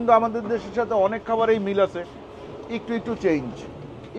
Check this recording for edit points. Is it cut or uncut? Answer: uncut